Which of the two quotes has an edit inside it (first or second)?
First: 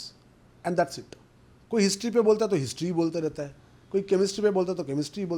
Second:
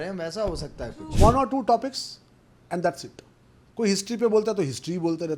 second